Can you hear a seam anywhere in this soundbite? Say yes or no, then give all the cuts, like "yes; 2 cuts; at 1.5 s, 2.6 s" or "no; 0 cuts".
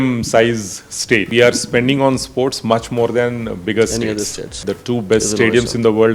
yes; 2 cuts; at 1.3 s, 4.7 s